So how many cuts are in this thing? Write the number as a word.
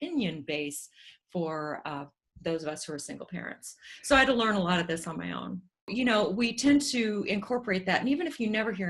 one